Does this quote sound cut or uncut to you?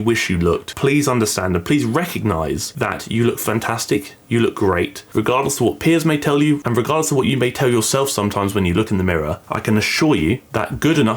cut